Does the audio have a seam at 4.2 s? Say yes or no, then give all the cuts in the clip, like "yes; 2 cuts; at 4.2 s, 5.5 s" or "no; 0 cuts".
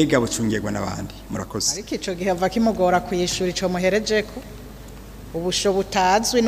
no; 1 cut; at 1.8 s